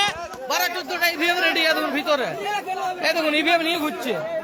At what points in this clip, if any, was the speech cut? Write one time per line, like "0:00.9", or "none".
none